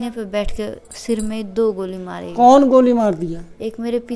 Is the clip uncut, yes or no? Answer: yes